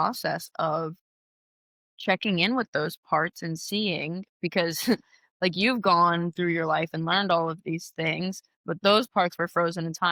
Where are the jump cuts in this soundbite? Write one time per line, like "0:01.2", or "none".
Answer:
none